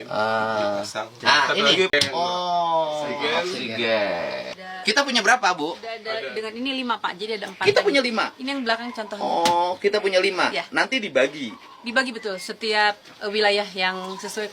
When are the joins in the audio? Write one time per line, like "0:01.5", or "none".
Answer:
0:02.1